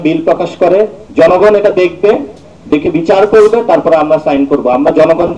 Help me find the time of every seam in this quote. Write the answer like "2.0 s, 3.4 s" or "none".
1.0 s